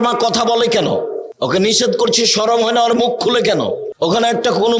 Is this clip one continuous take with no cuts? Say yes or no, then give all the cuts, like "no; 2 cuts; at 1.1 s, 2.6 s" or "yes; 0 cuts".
no; 2 cuts; at 1.2 s, 3.9 s